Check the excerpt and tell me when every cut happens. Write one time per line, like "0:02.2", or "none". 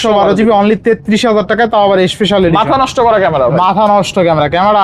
none

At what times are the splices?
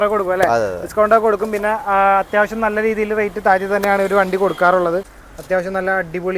0:05.2

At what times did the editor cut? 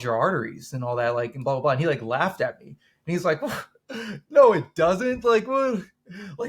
none

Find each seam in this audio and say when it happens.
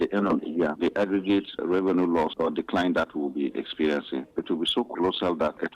0:00.7
0:01.5
0:02.3
0:04.3

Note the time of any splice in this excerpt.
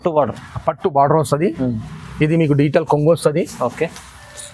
none

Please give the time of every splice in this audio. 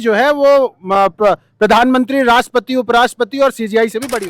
none

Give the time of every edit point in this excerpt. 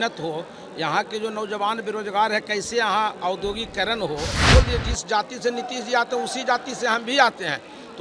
0:04.4

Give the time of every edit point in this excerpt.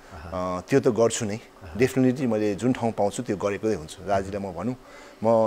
none

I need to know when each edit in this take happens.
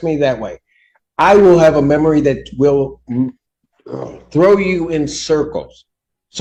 none

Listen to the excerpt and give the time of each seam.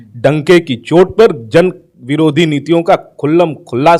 none

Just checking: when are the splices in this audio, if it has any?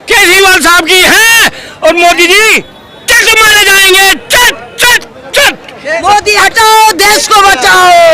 0:06.0

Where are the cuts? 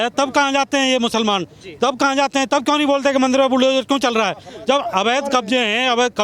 none

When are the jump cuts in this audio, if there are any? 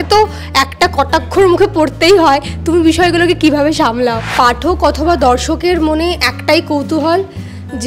0:04.2

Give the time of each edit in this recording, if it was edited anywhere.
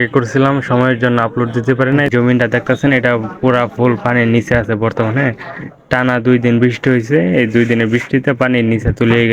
0:02.1

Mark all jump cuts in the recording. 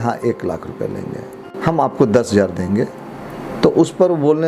0:01.4

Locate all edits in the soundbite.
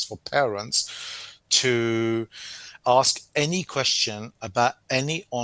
0:02.8

